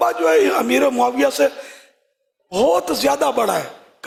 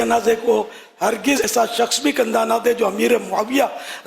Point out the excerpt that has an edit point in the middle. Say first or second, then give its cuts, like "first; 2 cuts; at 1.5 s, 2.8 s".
second; 1 cut; at 1.4 s